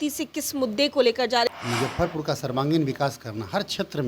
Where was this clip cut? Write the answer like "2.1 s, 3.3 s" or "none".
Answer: 1.5 s